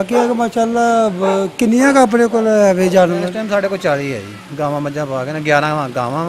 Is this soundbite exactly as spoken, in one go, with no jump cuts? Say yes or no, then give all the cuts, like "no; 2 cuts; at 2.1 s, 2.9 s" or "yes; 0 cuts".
yes; 0 cuts